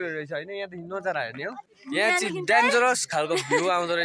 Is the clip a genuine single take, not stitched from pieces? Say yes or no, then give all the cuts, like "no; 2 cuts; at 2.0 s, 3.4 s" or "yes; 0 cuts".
no; 1 cut; at 1.7 s